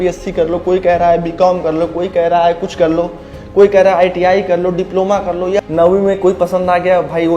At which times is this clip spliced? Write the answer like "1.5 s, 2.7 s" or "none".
5.6 s